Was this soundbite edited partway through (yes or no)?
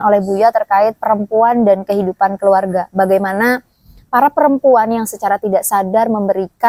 no